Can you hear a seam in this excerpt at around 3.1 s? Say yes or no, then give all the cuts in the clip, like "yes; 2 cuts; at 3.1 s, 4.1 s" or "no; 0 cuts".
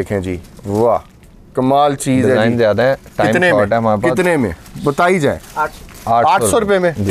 no; 0 cuts